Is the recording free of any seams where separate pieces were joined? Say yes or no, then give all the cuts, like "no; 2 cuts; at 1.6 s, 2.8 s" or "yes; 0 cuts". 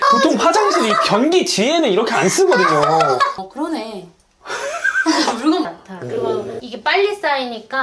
no; 1 cut; at 5.7 s